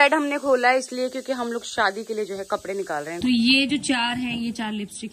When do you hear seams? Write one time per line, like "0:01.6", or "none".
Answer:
0:03.1